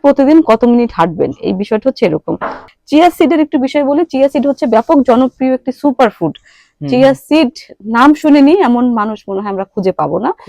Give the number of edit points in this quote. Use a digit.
1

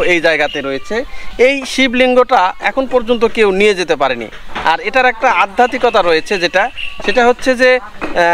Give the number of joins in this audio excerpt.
0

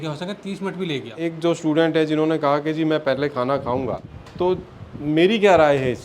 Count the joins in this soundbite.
2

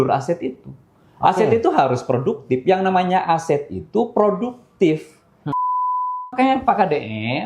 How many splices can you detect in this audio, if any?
1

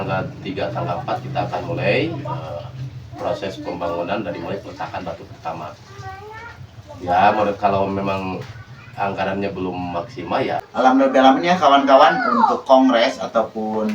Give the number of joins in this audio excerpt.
1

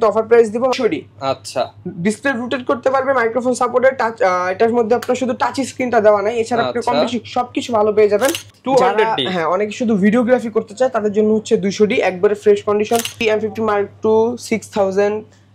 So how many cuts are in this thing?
3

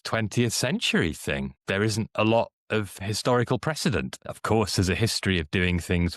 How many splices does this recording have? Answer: 3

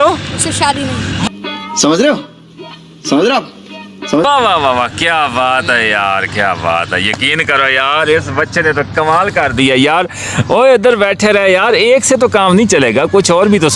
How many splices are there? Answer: 0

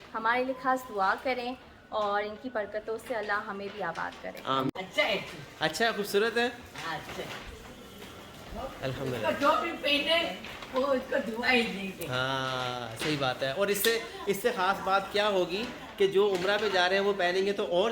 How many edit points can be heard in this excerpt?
1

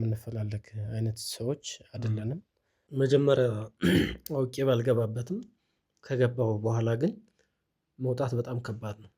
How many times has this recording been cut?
1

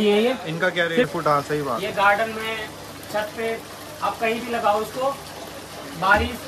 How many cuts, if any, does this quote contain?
1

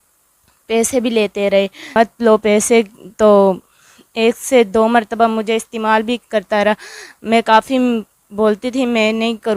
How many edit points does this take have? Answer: 1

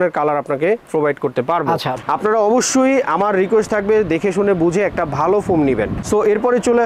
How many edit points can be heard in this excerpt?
2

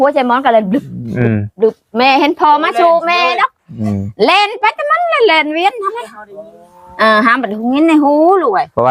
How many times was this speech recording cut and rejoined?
0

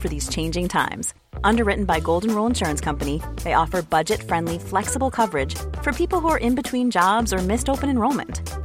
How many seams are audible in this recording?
0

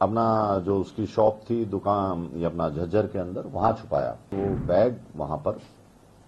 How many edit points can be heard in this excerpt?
1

